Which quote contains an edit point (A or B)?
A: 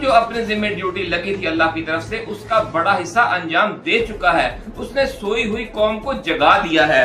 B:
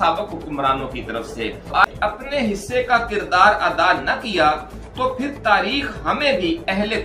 B